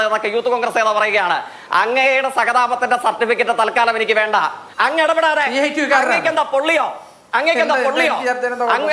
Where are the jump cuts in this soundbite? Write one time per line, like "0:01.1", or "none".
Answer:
0:04.6